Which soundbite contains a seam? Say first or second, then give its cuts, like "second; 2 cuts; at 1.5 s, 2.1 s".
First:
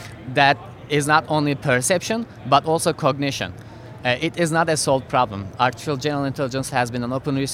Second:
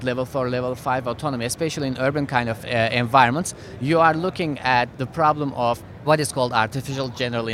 second; 1 cut; at 5.9 s